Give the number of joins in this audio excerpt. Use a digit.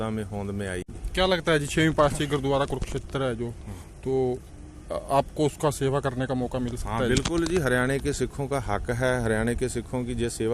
1